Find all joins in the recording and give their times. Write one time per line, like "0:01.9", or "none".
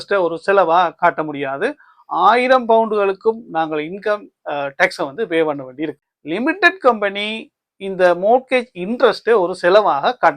0:06.0